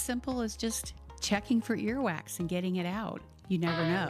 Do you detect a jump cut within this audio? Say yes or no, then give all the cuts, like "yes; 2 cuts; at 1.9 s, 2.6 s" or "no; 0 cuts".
no; 0 cuts